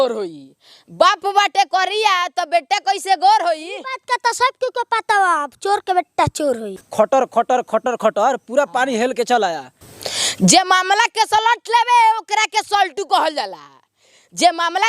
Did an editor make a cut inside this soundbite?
yes; 2 cuts; at 6.7 s, 9.8 s

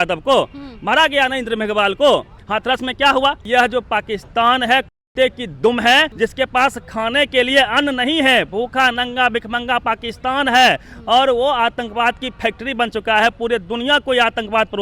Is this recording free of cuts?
no; 3 cuts; at 2.4 s, 3.4 s, 6.1 s

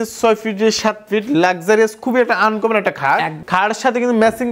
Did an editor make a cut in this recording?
yes; 1 cut; at 3.4 s

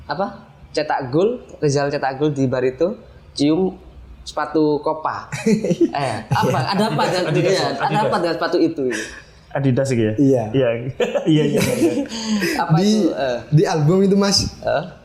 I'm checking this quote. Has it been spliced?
no; 0 cuts

